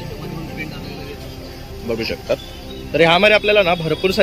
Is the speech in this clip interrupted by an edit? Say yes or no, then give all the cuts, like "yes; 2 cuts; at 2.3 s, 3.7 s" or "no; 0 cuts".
no; 0 cuts